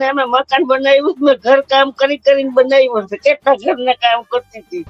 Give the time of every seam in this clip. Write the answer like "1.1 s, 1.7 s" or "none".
none

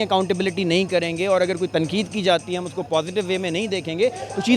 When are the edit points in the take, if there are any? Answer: none

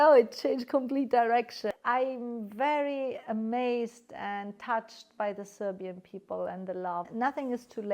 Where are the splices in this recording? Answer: 1.7 s, 7.1 s

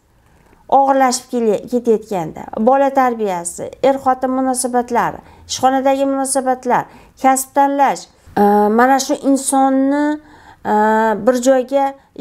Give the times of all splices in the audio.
8.1 s

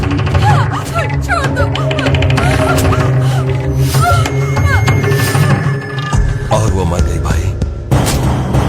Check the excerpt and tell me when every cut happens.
none

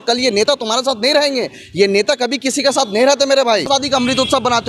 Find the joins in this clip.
3.7 s

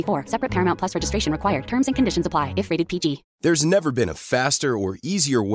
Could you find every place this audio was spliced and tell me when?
3.3 s

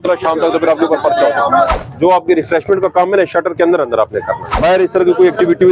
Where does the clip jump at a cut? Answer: 1.7 s, 4.4 s

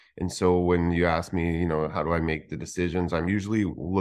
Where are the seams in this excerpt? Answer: none

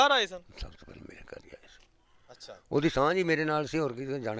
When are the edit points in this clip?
none

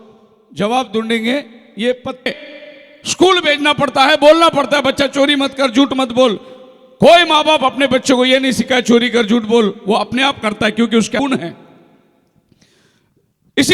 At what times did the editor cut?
2.3 s, 11.2 s

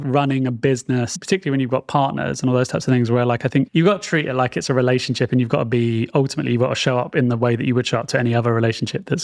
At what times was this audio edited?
1.1 s

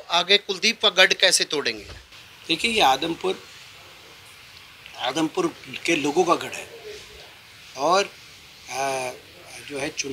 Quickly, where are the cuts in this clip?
none

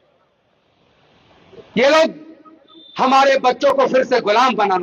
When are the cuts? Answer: none

